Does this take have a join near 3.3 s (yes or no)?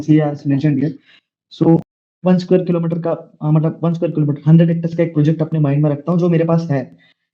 no